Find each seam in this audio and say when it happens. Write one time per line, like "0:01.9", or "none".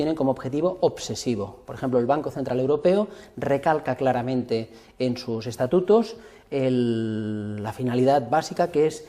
0:07.7

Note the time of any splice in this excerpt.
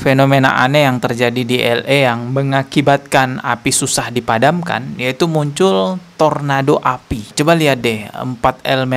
0:07.3

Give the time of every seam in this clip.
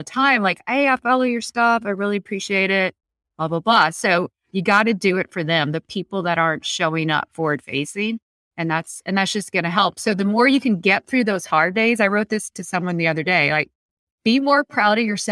none

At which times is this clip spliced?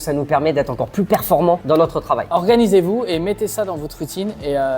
0:02.3

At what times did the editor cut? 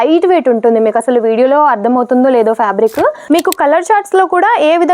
0:03.2

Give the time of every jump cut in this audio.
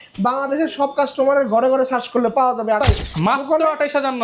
0:02.8

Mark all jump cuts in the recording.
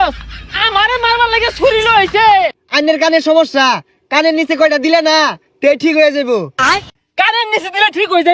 0:02.6
0:06.8

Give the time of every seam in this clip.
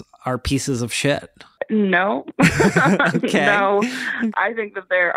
0:01.6
0:04.3

